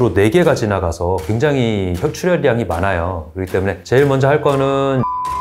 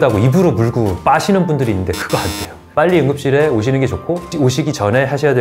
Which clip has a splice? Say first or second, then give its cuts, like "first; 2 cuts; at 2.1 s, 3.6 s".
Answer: second; 1 cut; at 2.6 s